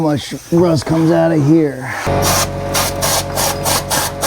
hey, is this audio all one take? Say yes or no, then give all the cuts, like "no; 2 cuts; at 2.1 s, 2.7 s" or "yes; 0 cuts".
no; 1 cut; at 2.1 s